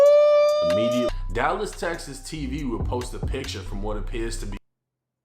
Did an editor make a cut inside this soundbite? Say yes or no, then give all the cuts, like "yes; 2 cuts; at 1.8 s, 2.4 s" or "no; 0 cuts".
yes; 1 cut; at 1.1 s